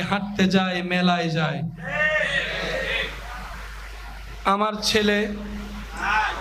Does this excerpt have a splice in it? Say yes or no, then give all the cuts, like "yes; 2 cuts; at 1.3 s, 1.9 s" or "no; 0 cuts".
no; 0 cuts